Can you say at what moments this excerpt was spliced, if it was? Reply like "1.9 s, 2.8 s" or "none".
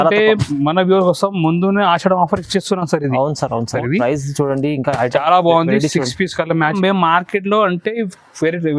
3.7 s, 6.7 s

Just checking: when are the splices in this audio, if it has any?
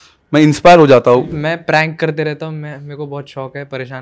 1.4 s

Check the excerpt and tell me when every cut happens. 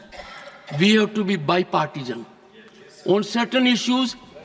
none

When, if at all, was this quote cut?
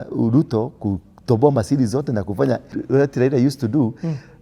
2.8 s

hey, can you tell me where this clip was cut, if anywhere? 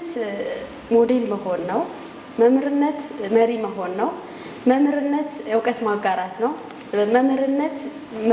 none

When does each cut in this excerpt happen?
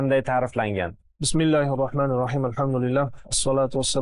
none

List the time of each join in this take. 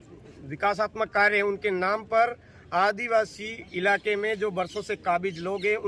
none

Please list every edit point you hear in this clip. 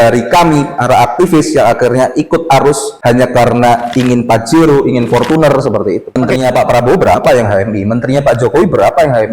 6.2 s

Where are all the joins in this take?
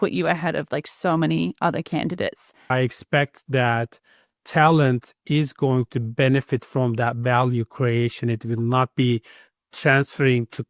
2.7 s

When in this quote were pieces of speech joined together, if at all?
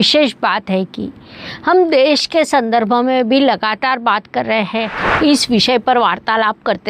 5.0 s

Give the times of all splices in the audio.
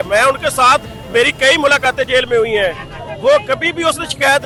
none

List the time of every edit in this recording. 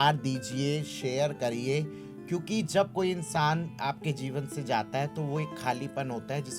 none

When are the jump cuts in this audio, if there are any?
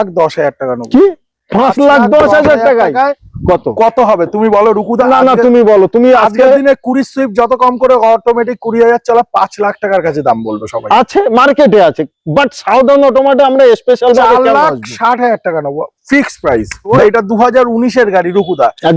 3.2 s, 16.9 s

